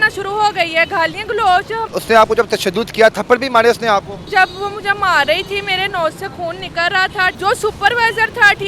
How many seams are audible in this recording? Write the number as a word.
three